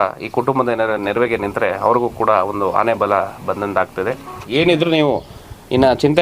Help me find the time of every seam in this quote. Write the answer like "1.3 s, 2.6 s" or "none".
4.3 s